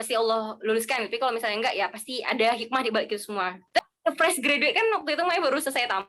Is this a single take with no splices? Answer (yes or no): no